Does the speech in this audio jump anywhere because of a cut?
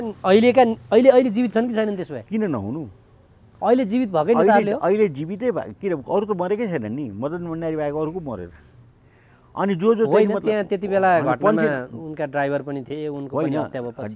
no; 0 cuts

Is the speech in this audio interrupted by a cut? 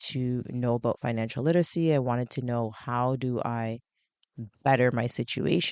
no; 0 cuts

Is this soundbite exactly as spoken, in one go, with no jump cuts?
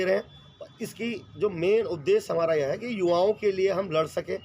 yes; 0 cuts

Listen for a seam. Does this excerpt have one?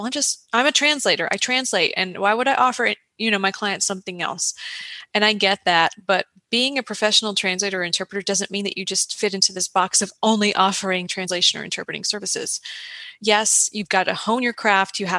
no; 0 cuts

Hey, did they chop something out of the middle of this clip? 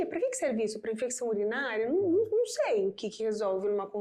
no; 0 cuts

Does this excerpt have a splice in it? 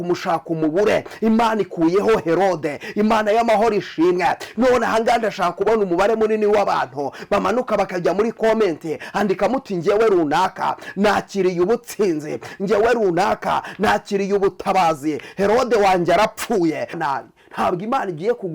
yes; 1 cut; at 17.0 s

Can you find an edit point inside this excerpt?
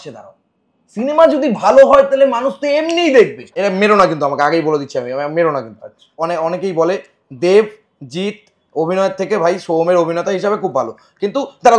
yes; 2 cuts; at 3.6 s, 6.2 s

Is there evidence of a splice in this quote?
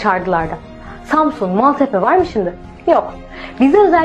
yes; 1 cut; at 1.5 s

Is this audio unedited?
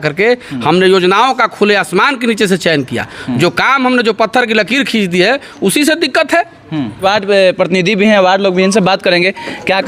yes; 0 cuts

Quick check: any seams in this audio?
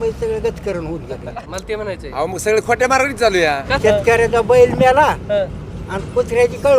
yes; 2 cuts; at 1.4 s, 3.7 s

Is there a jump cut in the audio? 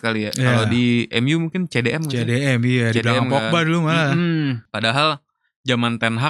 yes; 1 cut; at 4.7 s

